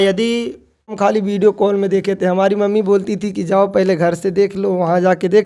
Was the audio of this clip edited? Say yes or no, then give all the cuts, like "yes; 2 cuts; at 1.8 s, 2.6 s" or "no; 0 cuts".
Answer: yes; 1 cut; at 0.9 s